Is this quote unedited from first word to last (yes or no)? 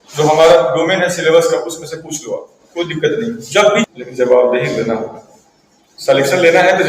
no